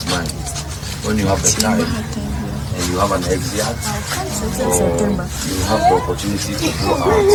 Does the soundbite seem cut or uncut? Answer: uncut